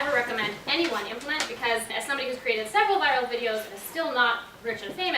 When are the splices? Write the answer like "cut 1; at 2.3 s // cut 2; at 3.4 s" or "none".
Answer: cut 1; at 1.9 s